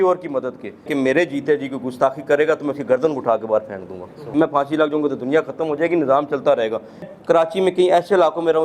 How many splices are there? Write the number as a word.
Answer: three